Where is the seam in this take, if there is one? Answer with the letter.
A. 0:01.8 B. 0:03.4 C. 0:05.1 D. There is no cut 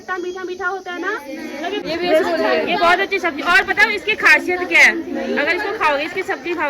A